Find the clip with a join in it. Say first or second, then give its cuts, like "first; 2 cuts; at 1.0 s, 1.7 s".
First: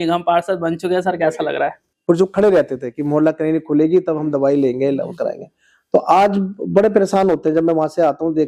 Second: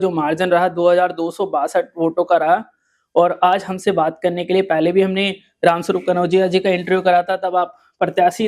first; 1 cut; at 1.9 s